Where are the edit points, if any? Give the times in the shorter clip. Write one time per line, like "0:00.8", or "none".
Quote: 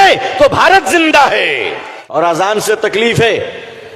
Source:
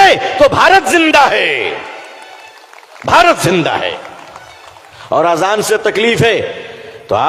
0:02.1